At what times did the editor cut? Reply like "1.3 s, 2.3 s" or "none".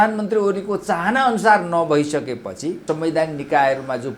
2.8 s